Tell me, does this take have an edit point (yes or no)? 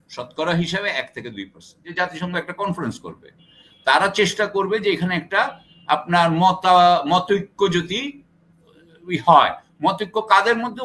yes